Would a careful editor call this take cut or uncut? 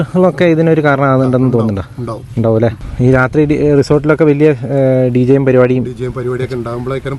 cut